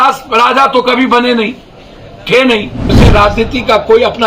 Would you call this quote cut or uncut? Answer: cut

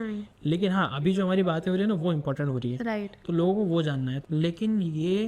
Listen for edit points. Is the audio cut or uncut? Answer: cut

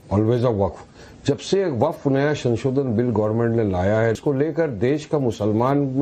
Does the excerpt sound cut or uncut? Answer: cut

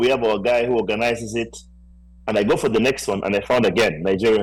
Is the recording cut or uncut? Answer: uncut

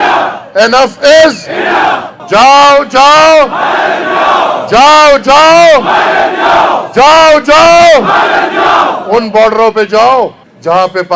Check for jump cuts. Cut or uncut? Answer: cut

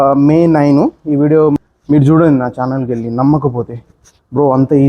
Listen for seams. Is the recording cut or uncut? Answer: cut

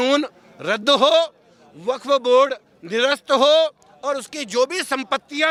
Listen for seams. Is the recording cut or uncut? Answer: uncut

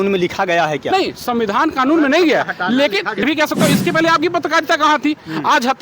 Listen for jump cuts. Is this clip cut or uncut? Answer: cut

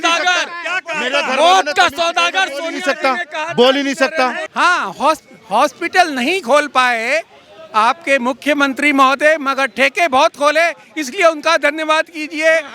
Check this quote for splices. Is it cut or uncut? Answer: cut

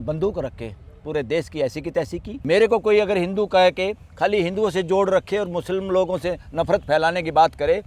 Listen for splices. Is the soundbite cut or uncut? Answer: cut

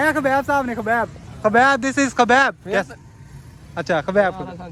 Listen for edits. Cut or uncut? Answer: uncut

